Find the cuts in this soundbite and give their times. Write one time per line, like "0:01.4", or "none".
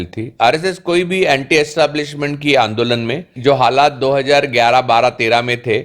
0:03.3